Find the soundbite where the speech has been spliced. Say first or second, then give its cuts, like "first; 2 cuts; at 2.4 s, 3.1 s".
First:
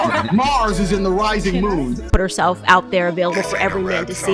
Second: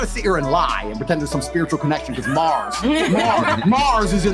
first; 1 cut; at 2.1 s